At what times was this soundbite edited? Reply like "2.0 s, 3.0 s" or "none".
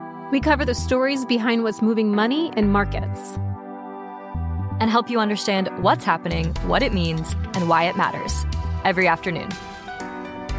none